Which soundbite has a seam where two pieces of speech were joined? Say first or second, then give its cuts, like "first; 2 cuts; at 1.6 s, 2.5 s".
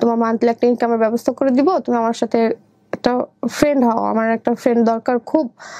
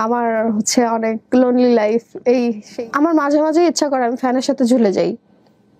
second; 1 cut; at 2.6 s